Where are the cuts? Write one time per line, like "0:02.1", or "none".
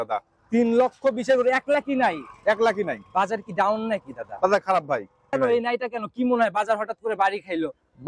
0:05.3